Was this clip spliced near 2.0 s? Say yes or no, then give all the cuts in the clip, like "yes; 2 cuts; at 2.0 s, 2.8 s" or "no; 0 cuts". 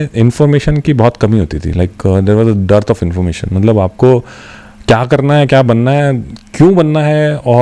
no; 0 cuts